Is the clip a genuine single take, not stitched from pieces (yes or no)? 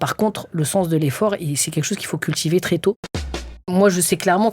no